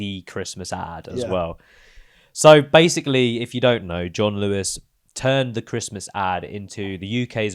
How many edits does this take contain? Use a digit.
0